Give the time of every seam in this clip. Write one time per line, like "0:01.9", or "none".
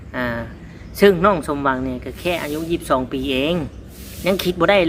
none

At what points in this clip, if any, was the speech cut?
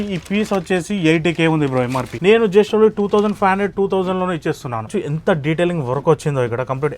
0:02.0
0:05.0

